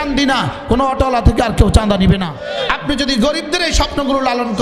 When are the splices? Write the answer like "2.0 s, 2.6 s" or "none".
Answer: 2.4 s